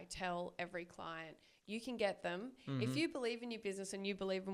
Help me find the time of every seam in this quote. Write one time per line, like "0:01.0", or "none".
none